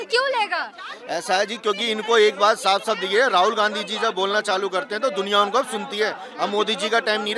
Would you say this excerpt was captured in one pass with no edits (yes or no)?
yes